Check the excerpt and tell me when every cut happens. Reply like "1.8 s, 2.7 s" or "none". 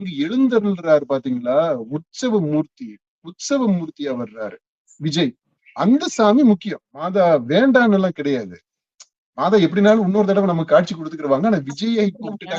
6.9 s

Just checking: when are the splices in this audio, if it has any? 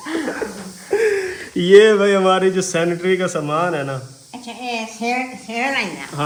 none

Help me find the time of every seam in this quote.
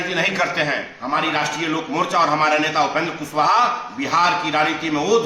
0.9 s

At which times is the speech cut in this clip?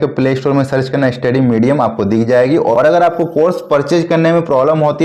2.7 s

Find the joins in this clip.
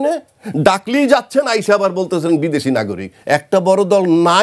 3.1 s

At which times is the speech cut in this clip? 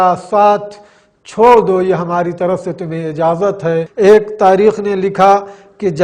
3.9 s

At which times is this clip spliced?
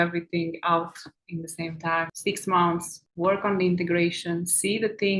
2.1 s

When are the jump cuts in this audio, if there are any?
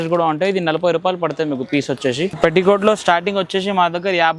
2.4 s

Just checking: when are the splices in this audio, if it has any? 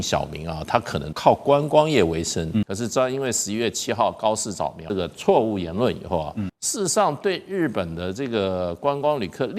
1.0 s, 2.7 s, 4.9 s, 6.6 s

